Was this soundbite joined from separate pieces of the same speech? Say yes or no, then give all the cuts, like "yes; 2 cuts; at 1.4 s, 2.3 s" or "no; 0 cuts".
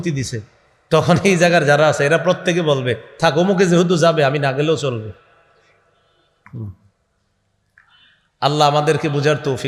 no; 0 cuts